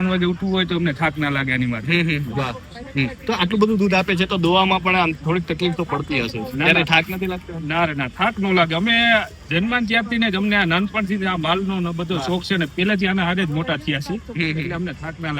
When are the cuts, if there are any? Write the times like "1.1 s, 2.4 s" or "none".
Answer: none